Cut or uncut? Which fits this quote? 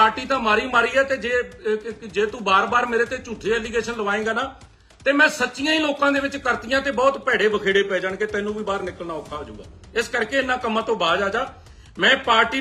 uncut